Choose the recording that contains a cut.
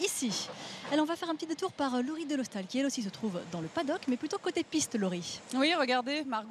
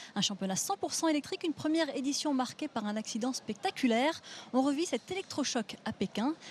first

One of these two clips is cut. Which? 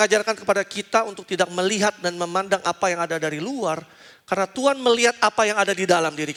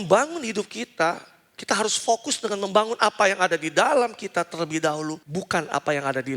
second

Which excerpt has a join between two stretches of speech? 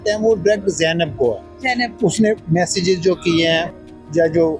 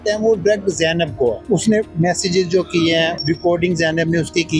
second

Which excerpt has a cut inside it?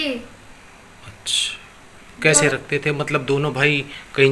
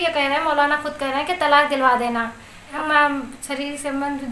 second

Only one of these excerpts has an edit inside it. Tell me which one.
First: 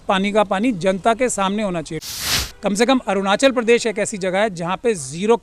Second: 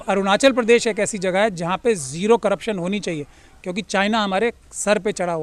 first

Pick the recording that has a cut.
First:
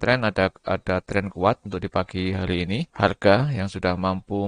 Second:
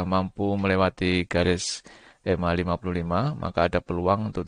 first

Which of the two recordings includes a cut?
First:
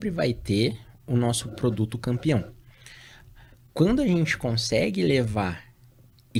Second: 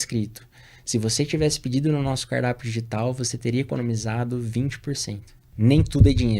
second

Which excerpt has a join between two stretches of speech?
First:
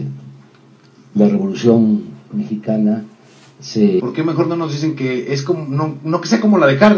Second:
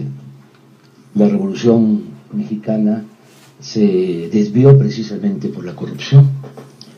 second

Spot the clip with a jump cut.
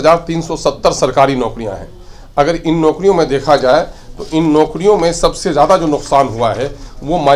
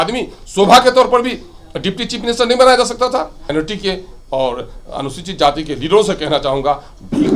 second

